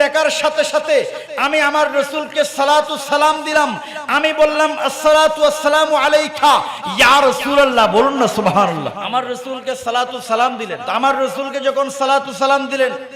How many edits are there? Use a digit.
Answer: 2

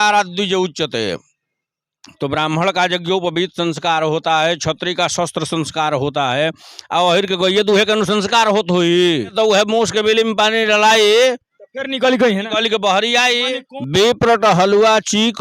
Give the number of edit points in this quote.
2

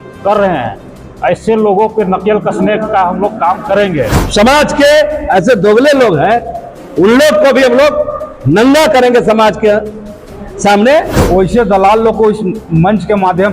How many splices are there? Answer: 2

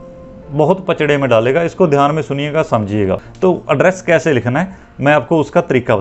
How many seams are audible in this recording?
1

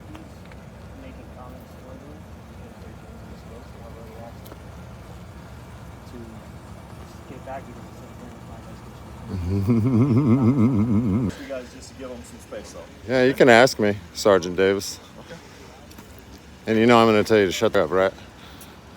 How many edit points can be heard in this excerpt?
2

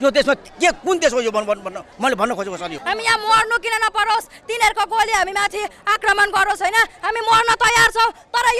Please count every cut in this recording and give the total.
1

